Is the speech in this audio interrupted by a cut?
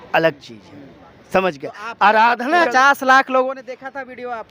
yes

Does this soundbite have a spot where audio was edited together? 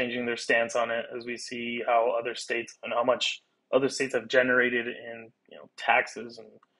no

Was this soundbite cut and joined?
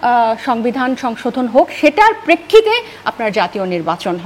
no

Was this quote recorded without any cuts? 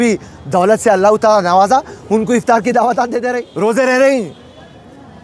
no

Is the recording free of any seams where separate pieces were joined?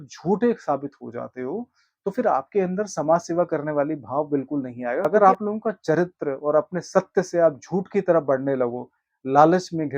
no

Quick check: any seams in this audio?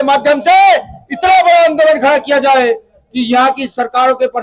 no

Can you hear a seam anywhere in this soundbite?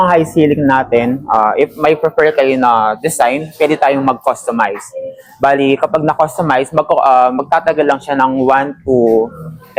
no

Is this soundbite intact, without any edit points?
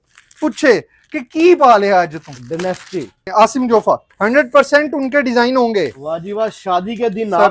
no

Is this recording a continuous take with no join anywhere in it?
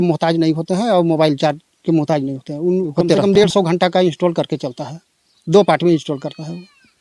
no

